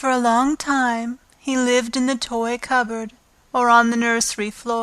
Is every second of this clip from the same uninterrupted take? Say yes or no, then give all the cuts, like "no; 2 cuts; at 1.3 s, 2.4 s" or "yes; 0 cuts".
no; 1 cut; at 2.6 s